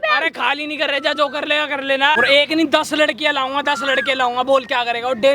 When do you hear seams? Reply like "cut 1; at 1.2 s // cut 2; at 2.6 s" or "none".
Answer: cut 1; at 2.2 s

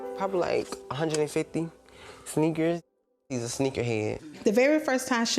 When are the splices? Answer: cut 1; at 4.2 s

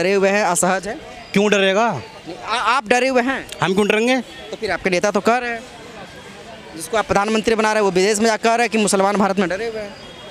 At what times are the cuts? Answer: none

